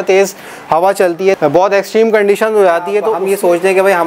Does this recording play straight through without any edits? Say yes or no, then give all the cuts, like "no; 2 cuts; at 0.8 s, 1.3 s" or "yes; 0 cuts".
no; 2 cuts; at 1.4 s, 3.1 s